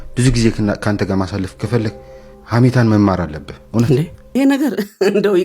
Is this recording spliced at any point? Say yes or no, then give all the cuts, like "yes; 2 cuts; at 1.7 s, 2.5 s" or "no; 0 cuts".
yes; 1 cut; at 4.2 s